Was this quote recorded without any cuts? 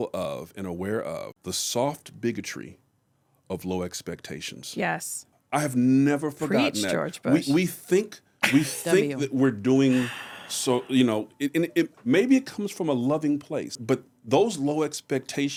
yes; 0 cuts

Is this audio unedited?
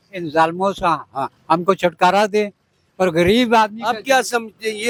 yes; 0 cuts

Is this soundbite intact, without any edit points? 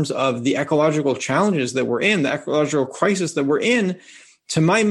yes; 0 cuts

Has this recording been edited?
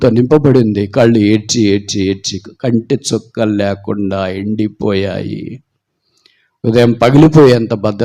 no; 0 cuts

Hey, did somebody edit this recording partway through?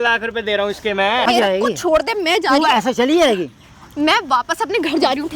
yes; 1 cut; at 1.3 s

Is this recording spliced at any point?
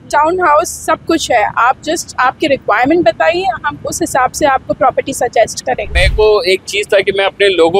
yes; 1 cut; at 5.9 s

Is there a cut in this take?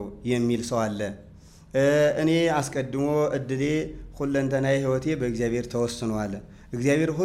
no; 0 cuts

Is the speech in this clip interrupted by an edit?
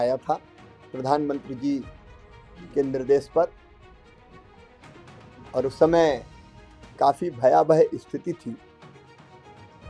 yes; 2 cuts; at 4.1 s, 5.5 s

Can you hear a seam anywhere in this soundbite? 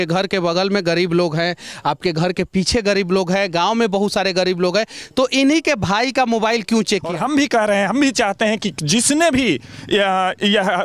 yes; 1 cut; at 7.1 s

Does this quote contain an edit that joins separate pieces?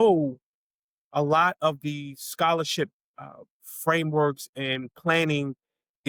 no; 0 cuts

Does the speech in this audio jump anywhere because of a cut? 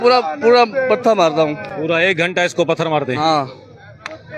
no; 0 cuts

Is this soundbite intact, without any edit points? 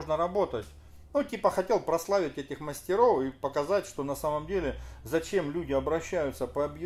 yes; 0 cuts

